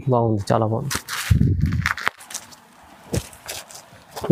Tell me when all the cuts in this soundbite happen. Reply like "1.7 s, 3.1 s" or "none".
none